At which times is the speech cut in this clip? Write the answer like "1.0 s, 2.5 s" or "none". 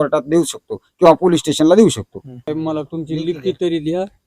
2.5 s